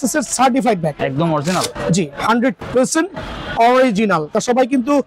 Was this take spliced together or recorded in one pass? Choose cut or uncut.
cut